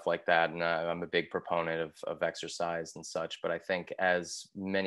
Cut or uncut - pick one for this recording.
uncut